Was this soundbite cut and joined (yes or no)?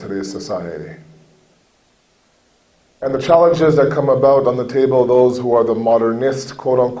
no